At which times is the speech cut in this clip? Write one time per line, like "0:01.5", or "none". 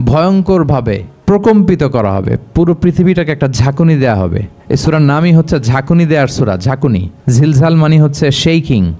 0:01.1
0:04.5
0:07.1